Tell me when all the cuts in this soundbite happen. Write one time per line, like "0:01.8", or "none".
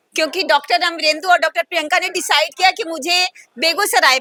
none